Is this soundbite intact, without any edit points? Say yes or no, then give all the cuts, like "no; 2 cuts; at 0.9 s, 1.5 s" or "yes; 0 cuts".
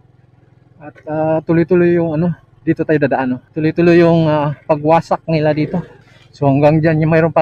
no; 2 cuts; at 3.5 s, 6.2 s